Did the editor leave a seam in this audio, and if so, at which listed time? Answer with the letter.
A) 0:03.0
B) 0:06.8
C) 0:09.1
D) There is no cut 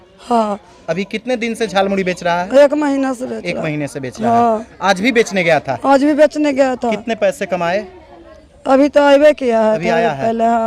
D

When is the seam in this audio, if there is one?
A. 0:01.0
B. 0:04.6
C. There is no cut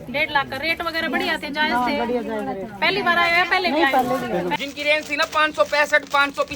B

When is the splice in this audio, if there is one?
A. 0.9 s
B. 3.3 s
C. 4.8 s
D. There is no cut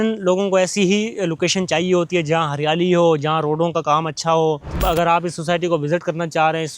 C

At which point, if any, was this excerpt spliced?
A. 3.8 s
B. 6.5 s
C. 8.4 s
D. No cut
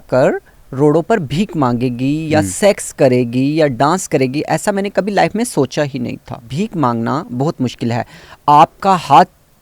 B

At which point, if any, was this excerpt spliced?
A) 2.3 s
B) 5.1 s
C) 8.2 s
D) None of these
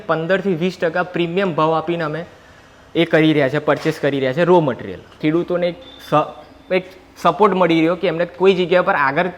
B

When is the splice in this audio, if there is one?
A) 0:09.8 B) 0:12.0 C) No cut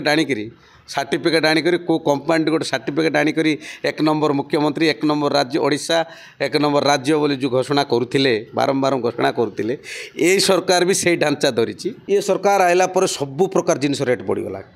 B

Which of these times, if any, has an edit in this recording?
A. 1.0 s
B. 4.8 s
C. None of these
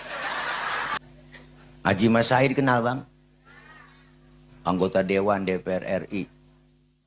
A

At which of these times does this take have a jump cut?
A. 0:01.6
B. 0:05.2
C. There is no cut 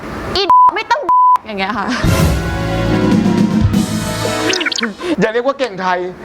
B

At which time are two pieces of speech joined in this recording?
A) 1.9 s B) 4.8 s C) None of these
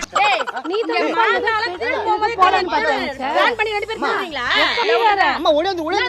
B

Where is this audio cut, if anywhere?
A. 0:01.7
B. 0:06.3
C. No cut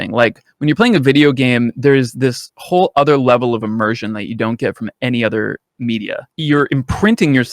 B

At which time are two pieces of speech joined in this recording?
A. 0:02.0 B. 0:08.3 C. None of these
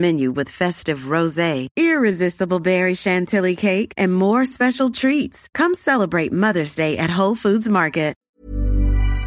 B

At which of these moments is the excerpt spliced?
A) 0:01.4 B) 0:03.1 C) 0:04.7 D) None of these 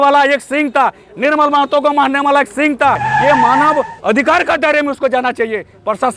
B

